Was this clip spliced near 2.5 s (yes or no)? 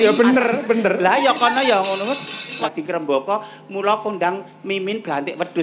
yes